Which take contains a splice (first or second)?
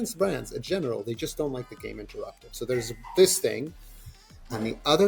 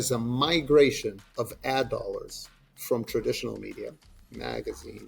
second